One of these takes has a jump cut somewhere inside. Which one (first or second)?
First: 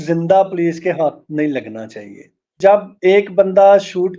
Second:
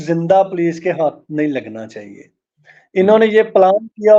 first